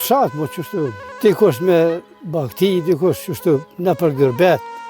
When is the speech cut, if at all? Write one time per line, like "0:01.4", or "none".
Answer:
0:01.0
0:03.7